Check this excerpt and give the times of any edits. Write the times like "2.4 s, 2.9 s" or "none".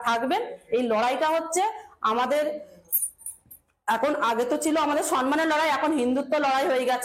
none